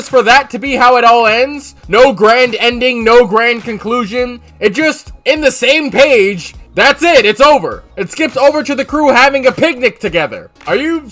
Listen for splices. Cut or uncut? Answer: uncut